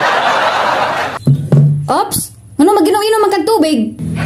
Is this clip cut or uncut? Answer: cut